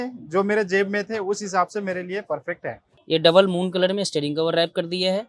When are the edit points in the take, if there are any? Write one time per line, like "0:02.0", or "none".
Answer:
0:02.9